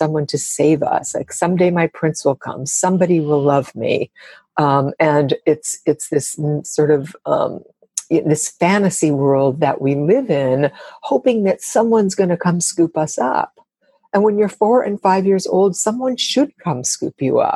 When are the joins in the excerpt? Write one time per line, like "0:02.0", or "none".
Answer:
none